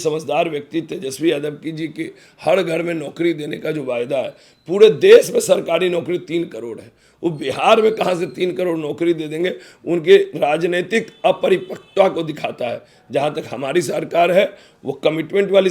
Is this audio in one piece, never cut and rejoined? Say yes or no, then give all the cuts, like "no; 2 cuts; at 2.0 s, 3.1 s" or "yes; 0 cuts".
yes; 0 cuts